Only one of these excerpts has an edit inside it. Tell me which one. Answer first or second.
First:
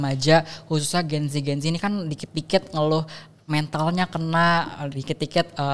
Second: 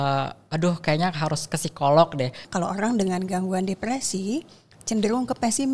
second